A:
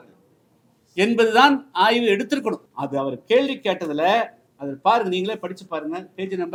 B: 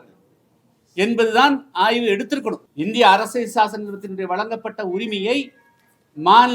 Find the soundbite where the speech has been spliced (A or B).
B